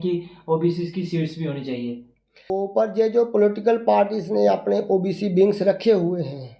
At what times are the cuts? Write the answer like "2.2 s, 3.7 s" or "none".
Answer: 2.5 s